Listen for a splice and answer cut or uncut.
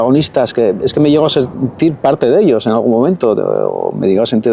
uncut